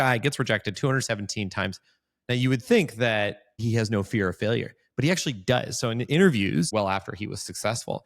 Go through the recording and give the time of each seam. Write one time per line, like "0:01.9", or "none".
0:03.6
0:06.7